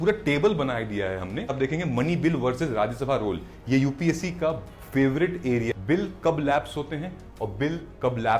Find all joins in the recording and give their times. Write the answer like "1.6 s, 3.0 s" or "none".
1.5 s, 5.7 s